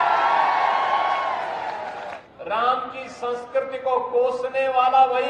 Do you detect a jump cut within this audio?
yes; 1 cut; at 2.2 s

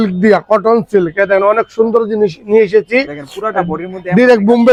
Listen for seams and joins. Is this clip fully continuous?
yes; 0 cuts

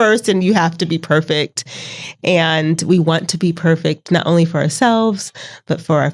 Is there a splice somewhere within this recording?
no; 0 cuts

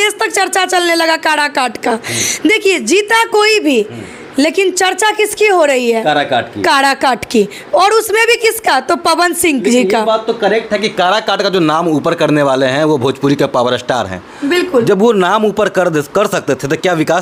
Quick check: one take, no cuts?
yes; 0 cuts

